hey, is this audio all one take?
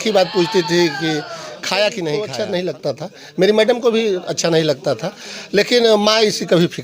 no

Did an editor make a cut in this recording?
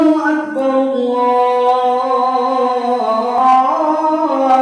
no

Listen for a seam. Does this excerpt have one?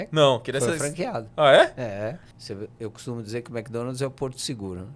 yes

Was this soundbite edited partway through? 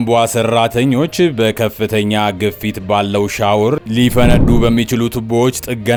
no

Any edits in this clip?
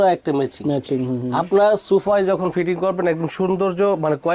no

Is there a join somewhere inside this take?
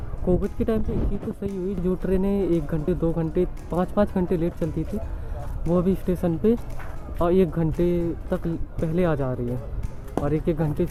no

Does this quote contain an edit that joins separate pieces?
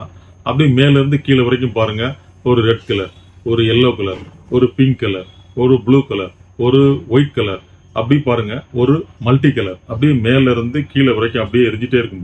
no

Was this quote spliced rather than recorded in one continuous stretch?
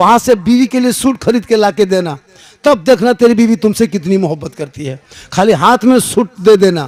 no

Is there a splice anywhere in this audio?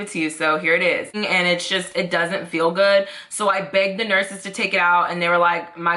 yes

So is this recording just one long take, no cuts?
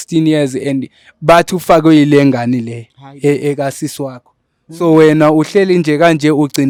yes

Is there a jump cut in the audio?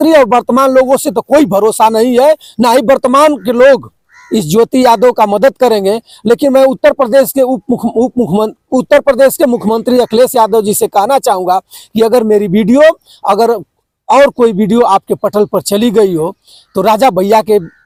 no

